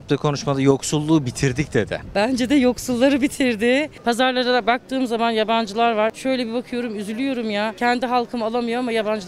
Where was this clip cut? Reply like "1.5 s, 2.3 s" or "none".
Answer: 2.0 s, 3.9 s, 6.2 s, 7.7 s